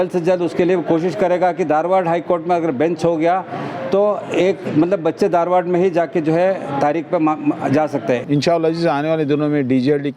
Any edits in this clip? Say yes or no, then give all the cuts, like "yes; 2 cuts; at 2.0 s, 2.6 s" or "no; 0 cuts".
yes; 1 cut; at 8.2 s